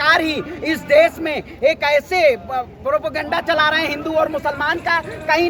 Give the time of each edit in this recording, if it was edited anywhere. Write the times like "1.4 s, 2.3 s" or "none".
none